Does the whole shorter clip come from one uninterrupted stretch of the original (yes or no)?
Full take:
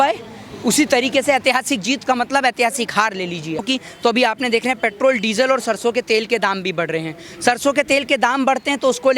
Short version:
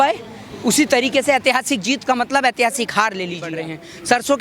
no